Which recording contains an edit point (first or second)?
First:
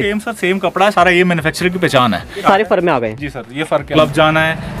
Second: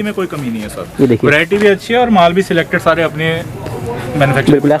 first